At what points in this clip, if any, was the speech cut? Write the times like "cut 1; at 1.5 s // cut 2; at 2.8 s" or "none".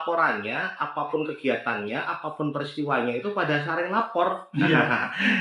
none